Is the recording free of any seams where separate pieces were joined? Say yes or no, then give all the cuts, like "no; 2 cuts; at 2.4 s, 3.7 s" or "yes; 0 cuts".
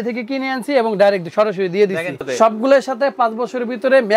no; 1 cut; at 2.2 s